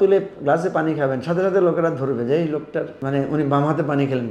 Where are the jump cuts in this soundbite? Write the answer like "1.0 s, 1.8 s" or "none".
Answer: 3.0 s